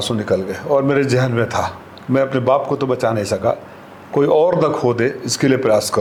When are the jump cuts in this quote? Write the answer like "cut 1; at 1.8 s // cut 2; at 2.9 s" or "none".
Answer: none